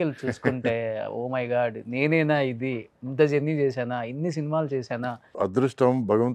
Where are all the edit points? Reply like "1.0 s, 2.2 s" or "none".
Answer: 5.3 s